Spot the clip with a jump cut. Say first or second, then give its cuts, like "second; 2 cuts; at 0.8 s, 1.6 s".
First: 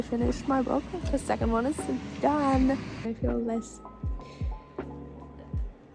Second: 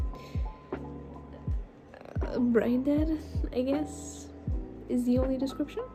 first; 1 cut; at 3.1 s